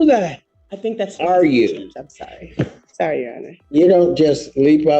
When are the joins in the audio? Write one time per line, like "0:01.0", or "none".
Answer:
0:02.8
0:03.6

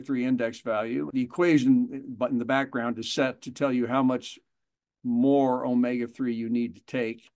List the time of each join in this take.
0:01.1

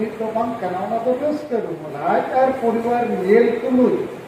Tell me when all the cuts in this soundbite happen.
0:01.8

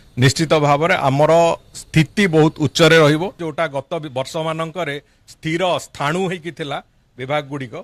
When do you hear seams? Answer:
0:03.4

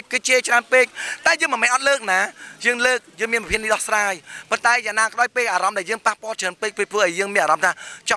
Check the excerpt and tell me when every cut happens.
none

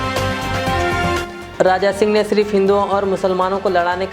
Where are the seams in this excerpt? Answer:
0:01.2

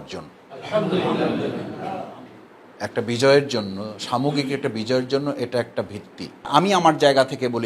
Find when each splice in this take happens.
0:06.5

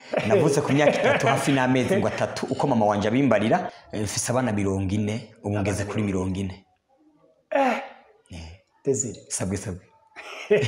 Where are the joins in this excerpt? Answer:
0:03.8

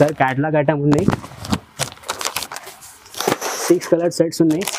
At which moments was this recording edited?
none

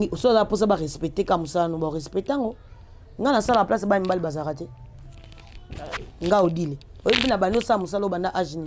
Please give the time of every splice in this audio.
none

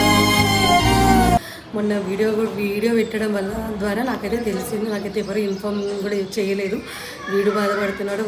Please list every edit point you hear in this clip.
none

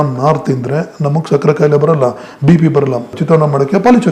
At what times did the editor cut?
0:03.1

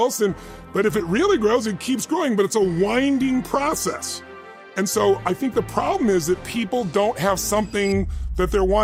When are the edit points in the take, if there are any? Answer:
none

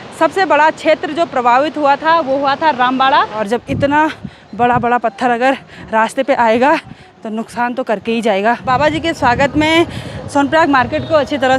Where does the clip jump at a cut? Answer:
0:03.4
0:08.7

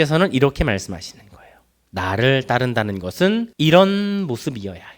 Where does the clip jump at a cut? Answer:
0:03.5

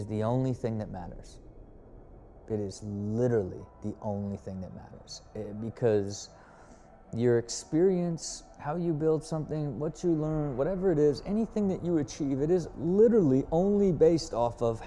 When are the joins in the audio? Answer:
none

